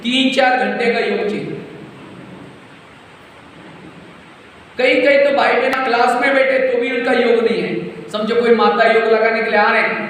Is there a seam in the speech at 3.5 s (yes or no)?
no